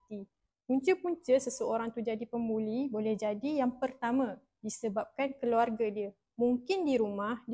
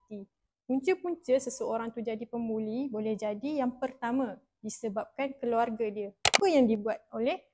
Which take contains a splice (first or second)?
second